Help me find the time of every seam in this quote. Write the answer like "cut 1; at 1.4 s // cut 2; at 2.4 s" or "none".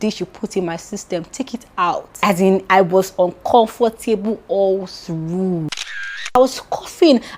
cut 1; at 2.1 s // cut 2; at 6.4 s